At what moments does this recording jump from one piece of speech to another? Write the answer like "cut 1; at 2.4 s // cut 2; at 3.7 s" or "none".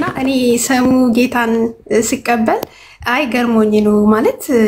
none